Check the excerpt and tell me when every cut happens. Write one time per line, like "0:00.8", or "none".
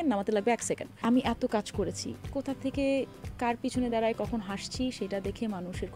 0:00.9